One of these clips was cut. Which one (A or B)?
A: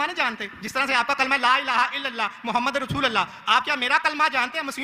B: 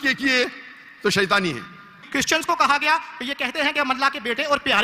B